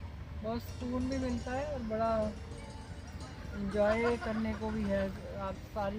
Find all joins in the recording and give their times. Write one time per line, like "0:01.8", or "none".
none